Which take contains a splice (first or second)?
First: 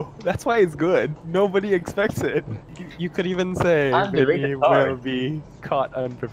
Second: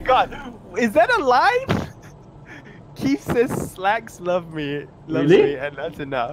first